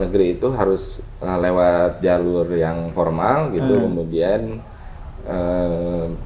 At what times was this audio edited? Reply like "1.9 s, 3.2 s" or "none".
none

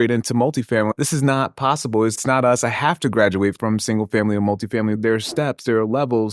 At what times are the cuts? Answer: 0.9 s, 2.2 s, 3.6 s, 4.9 s

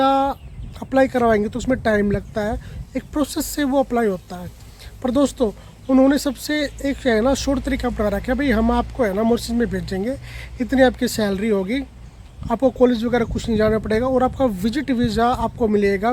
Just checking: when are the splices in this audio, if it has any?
none

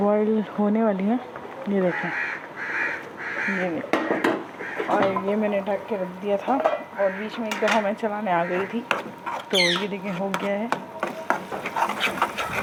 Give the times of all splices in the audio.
none

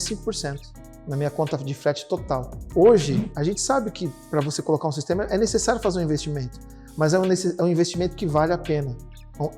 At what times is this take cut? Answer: 2.6 s

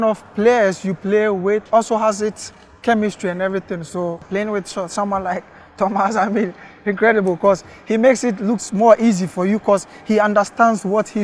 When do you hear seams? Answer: 4.3 s

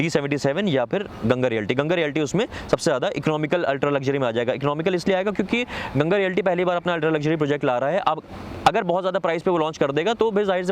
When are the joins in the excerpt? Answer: none

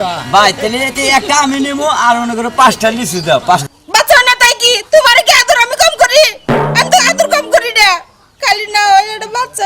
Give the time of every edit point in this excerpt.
3.8 s

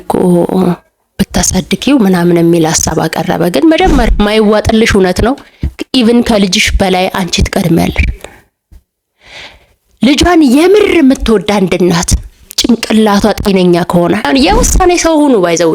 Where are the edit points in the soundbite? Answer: 4.1 s, 14.2 s

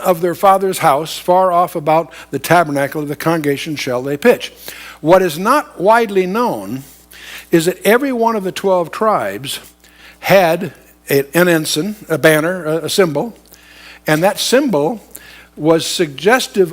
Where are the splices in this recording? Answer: 0.9 s

